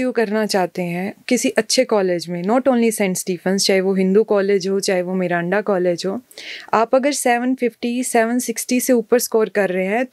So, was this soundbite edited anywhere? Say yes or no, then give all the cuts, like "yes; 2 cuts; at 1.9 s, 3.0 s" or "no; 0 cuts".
no; 0 cuts